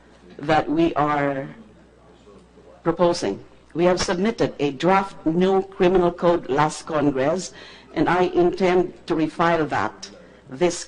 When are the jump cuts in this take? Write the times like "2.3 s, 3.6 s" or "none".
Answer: 9.3 s